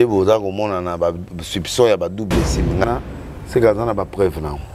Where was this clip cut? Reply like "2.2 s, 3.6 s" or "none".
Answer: 2.8 s